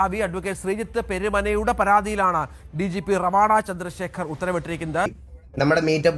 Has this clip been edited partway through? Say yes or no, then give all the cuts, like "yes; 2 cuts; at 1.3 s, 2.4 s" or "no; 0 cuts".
yes; 1 cut; at 5.2 s